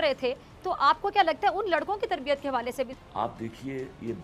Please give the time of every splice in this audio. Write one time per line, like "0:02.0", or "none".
0:02.9